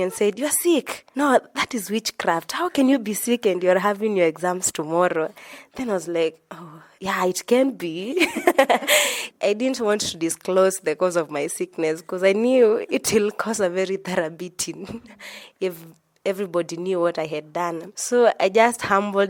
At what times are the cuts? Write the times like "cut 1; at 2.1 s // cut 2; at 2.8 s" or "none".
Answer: none